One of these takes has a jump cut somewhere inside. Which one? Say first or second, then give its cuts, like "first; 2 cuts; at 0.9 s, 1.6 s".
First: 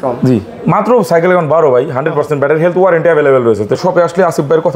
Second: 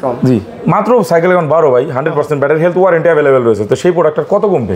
first; 1 cut; at 3.8 s